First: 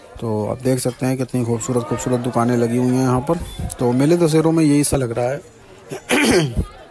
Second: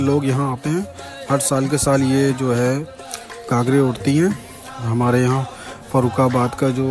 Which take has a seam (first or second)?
first